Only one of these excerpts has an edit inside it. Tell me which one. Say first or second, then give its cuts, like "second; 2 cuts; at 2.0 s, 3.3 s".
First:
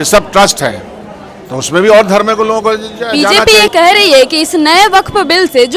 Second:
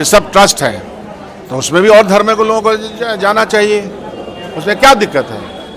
first; 1 cut; at 3.2 s